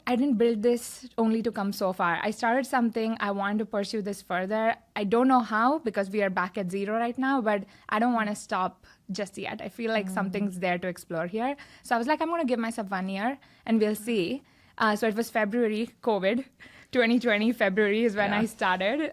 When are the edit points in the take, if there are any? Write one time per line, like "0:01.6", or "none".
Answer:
none